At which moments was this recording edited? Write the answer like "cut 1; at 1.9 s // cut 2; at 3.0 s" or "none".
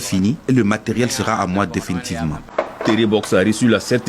cut 1; at 2.4 s